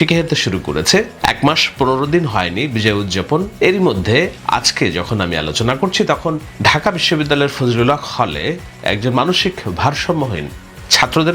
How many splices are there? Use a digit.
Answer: 2